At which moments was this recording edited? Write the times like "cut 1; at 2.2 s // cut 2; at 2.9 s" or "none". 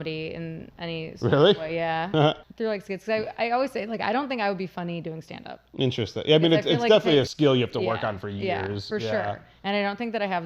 cut 1; at 2.5 s // cut 2; at 7.3 s